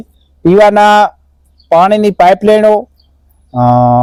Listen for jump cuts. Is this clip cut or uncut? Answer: uncut